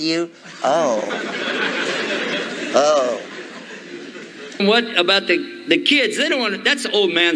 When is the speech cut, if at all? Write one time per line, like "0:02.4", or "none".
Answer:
0:04.6